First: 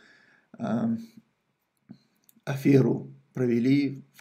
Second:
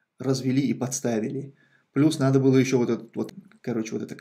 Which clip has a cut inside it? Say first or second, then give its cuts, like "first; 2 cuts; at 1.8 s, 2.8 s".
second; 1 cut; at 3.3 s